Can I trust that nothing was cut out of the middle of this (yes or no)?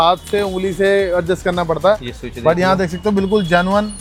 yes